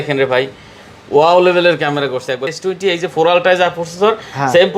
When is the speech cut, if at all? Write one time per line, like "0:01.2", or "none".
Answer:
0:02.5